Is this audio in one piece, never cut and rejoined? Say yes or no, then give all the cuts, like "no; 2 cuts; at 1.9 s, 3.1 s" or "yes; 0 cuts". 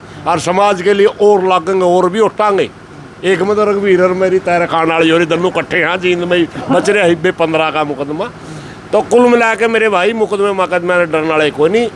yes; 0 cuts